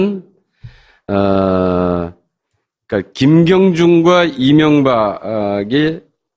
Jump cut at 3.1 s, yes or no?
no